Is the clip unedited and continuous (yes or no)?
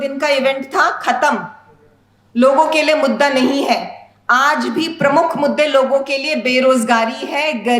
yes